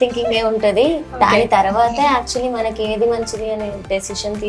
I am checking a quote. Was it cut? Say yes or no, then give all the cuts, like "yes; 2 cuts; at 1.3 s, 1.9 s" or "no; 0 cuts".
no; 0 cuts